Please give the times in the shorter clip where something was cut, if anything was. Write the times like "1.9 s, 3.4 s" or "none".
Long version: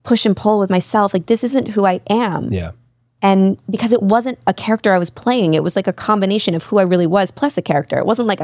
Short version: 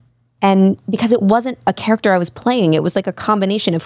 none